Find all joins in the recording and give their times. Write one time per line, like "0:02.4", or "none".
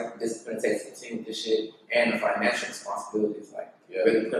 none